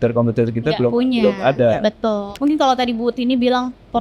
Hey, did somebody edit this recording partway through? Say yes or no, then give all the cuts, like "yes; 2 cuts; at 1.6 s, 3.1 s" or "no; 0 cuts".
yes; 1 cut; at 2.3 s